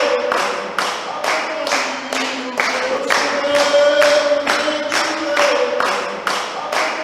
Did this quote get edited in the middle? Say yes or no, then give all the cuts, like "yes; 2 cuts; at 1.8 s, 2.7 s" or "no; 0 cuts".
yes; 1 cut; at 2.9 s